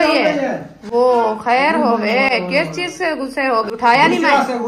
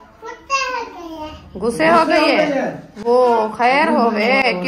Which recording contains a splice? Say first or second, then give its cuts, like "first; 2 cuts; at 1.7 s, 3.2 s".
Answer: first; 1 cut; at 3.7 s